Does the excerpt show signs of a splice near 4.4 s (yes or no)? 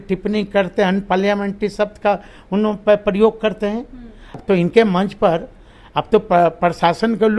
yes